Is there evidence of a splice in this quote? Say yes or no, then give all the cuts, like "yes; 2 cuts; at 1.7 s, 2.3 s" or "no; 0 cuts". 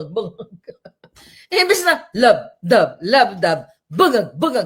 no; 0 cuts